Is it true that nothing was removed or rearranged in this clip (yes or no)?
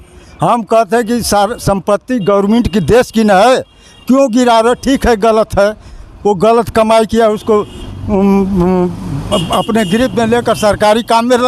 yes